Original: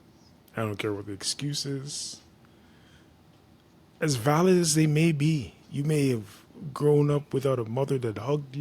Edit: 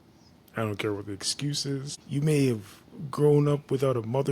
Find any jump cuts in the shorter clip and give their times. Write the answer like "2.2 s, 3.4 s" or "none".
2.0 s

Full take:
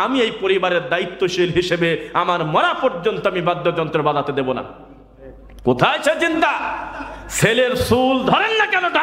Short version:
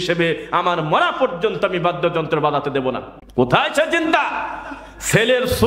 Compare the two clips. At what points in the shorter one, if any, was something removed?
3.1 s

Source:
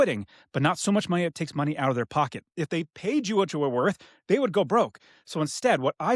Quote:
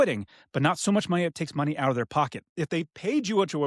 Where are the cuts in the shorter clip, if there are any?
none

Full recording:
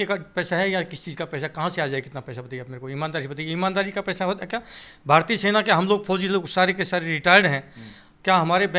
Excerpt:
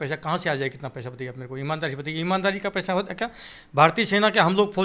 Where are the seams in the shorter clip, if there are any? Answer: none

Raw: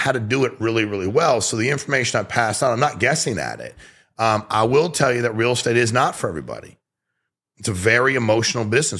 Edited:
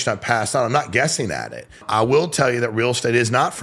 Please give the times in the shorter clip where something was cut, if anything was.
1.8 s

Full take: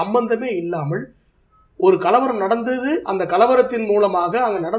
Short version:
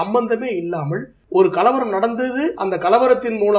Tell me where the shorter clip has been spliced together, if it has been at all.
1.1 s

